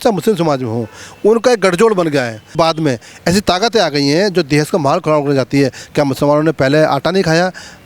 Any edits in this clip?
yes; 1 cut; at 2.6 s

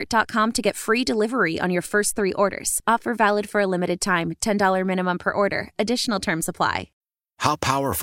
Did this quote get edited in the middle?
yes; 1 cut; at 6.9 s

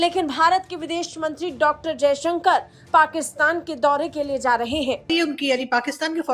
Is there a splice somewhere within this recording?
yes; 1 cut; at 5.1 s

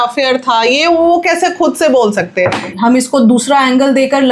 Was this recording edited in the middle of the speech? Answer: yes; 1 cut; at 2.7 s

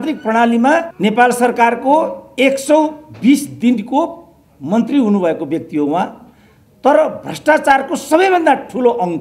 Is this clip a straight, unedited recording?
no; 1 cut; at 0.9 s

